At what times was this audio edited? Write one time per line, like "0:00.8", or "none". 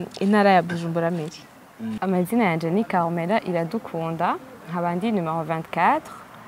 0:01.9